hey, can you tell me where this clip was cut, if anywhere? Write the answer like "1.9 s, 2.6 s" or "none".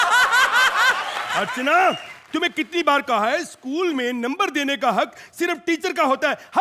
1.2 s